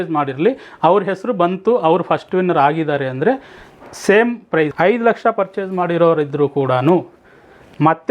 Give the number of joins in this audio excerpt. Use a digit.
1